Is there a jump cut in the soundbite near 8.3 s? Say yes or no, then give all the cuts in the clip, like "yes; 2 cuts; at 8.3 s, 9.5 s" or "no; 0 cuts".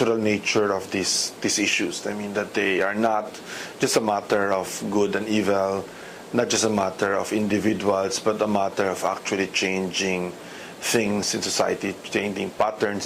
no; 1 cut; at 3.4 s